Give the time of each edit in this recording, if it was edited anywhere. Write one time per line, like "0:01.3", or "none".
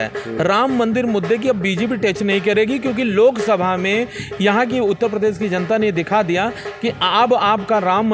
none